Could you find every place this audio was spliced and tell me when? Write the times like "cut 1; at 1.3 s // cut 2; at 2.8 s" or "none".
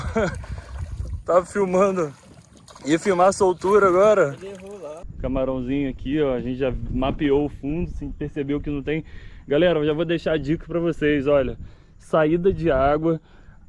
cut 1; at 5.0 s